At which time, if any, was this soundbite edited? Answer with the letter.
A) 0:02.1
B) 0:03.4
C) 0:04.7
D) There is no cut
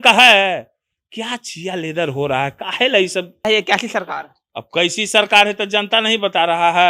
B